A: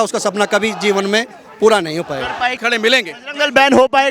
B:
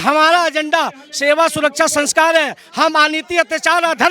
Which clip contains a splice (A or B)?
A